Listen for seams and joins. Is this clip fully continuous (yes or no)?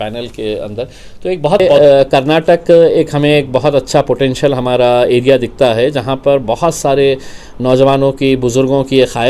no